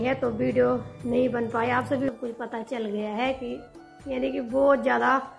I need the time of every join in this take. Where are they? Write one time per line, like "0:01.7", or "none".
0:02.1